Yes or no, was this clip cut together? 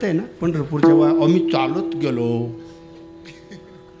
no